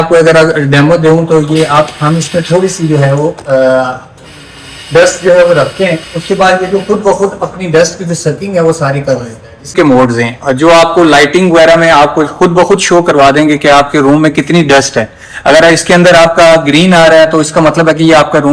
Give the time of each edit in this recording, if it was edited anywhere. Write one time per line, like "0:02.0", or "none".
0:09.7